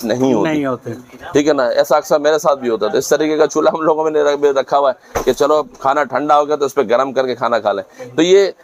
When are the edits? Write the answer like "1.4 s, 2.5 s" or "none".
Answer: none